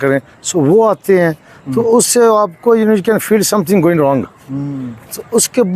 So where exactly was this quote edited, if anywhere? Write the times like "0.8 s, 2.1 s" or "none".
none